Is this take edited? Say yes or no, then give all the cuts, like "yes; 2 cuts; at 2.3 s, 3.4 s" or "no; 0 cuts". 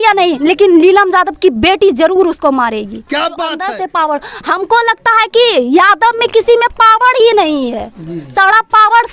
yes; 1 cut; at 3.6 s